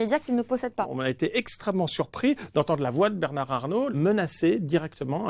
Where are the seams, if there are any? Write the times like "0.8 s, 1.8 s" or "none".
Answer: 0.9 s, 3.9 s